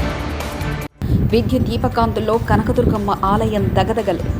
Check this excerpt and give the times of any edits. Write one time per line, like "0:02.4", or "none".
none